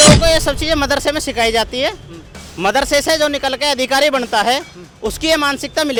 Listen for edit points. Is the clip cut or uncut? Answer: uncut